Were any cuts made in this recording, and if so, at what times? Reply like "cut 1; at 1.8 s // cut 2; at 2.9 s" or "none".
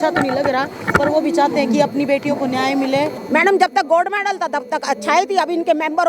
cut 1; at 3.2 s